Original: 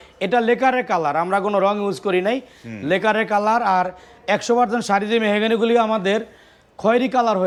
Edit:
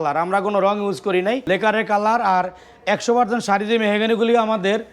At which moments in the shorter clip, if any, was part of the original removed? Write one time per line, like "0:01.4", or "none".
0:01.4